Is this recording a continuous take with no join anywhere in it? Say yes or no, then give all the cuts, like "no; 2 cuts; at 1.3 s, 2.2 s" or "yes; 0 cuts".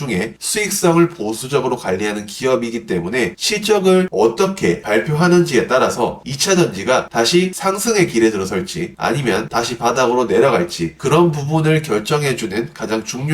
no; 2 cuts; at 9.5 s, 10.9 s